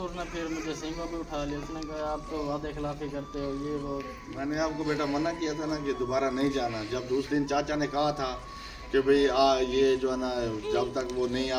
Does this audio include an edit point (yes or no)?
yes